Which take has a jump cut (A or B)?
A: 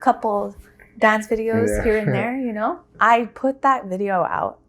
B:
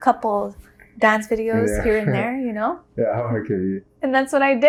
A